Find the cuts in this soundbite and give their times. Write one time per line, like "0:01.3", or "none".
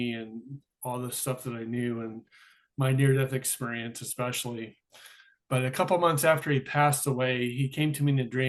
none